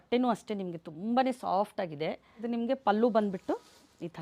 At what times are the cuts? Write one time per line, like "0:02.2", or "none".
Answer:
0:02.3